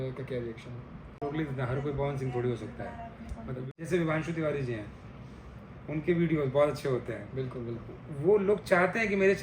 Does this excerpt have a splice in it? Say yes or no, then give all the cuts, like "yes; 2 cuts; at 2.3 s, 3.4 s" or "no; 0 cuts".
yes; 2 cuts; at 1.0 s, 3.6 s